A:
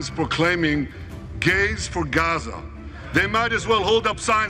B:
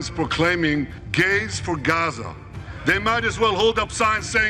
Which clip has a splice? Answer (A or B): B